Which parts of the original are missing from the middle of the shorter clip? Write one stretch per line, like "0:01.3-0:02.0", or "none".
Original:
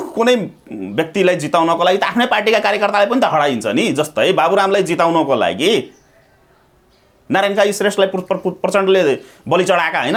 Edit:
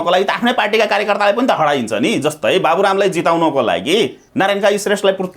0:05.9-0:07.2